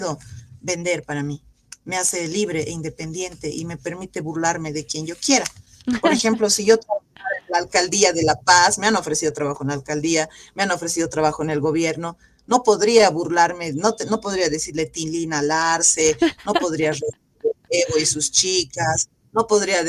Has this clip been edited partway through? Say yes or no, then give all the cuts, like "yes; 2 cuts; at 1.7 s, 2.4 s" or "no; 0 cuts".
no; 0 cuts